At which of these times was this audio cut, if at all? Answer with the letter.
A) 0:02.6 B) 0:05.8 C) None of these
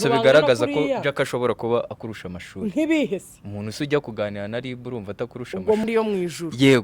B